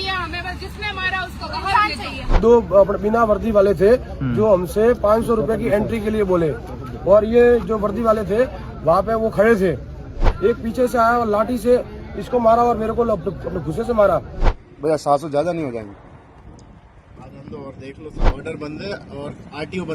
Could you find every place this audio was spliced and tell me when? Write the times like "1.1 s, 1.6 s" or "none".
2.3 s, 10.2 s, 14.4 s, 18.4 s